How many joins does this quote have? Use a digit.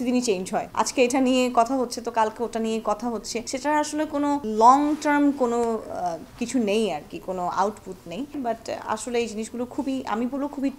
1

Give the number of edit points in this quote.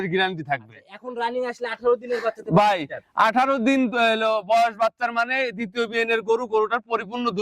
0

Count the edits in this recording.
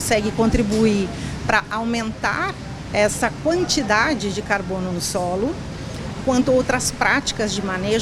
0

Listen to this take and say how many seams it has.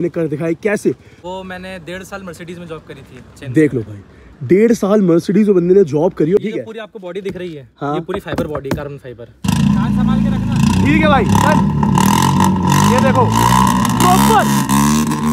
3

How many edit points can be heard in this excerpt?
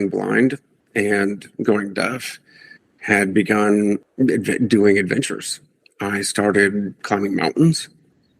2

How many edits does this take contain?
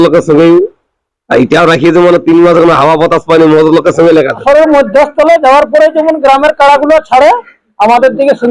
1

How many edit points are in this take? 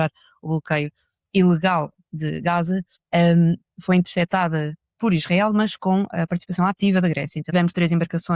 2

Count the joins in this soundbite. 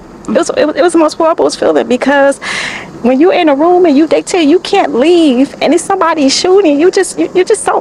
0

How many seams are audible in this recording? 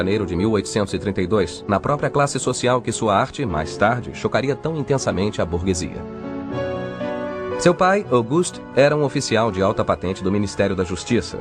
1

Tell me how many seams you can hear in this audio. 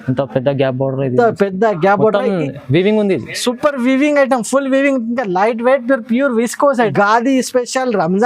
1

